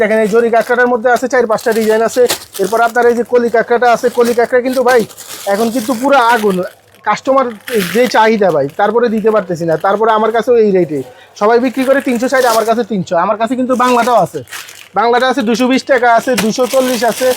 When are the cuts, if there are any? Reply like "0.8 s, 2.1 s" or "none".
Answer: none